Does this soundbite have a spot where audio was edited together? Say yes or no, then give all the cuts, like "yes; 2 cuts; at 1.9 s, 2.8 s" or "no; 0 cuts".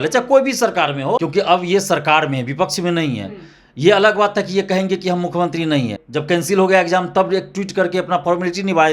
yes; 2 cuts; at 1.2 s, 6.0 s